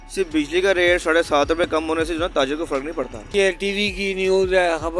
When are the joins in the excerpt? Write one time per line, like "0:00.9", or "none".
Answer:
0:03.3